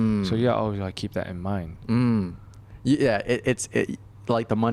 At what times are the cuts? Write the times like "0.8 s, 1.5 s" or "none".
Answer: none